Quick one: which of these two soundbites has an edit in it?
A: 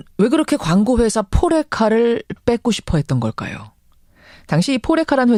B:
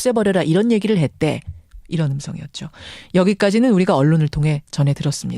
B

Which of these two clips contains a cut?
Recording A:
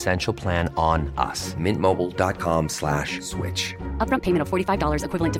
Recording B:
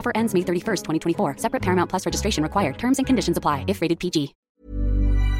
B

